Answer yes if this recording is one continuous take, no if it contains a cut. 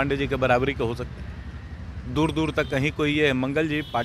yes